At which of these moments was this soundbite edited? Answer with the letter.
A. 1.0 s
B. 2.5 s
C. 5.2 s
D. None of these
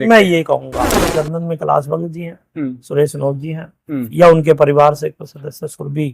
A